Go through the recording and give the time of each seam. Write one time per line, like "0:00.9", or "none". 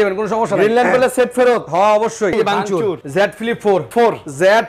0:02.4
0:03.9